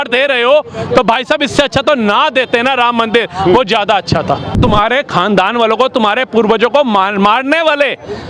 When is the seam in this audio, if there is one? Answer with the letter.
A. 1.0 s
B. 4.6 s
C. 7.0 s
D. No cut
B